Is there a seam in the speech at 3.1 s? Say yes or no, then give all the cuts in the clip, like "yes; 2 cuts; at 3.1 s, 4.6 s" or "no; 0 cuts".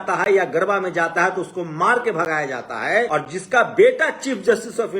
yes; 1 cut; at 3.1 s